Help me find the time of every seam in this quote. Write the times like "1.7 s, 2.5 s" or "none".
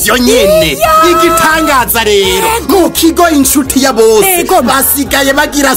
none